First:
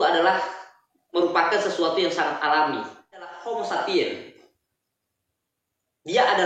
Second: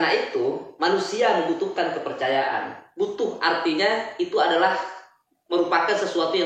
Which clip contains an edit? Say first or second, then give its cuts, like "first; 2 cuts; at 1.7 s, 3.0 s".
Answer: first; 1 cut; at 3.4 s